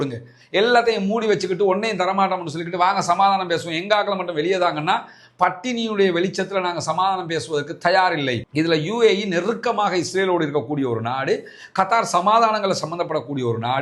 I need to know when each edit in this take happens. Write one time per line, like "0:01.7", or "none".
0:08.4